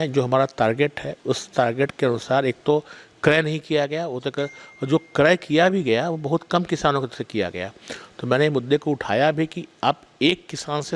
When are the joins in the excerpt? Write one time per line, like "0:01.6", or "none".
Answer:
none